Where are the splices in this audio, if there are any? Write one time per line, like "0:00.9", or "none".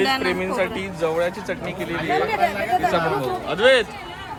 none